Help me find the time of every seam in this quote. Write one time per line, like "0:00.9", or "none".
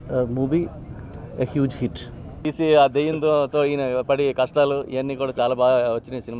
0:02.4